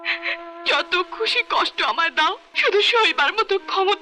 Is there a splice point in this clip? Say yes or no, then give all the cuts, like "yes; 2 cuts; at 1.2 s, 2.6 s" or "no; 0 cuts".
yes; 1 cut; at 2.5 s